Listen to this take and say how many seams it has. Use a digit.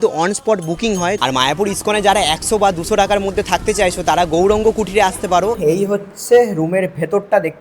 2